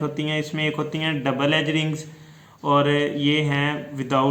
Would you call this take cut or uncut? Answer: uncut